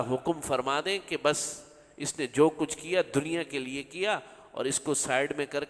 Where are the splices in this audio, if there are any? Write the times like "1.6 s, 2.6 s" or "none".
none